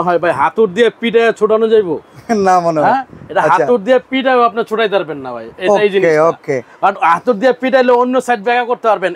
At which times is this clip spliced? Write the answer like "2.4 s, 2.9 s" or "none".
none